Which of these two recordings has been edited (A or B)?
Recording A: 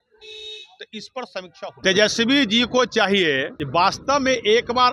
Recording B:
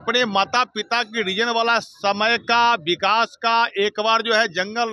A